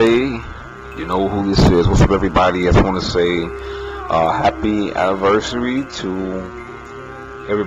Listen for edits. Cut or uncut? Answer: cut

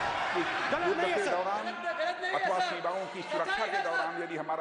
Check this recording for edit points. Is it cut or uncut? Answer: uncut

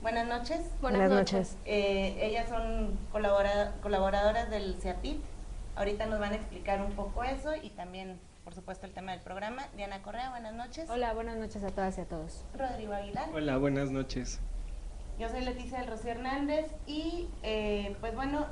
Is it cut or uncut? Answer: cut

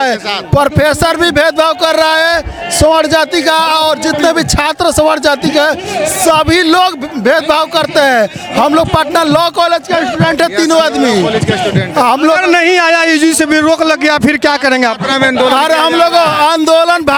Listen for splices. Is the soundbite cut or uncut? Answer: uncut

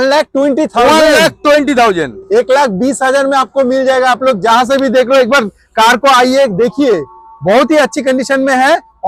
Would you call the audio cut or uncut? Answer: uncut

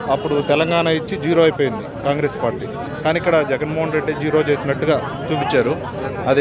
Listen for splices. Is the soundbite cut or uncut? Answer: uncut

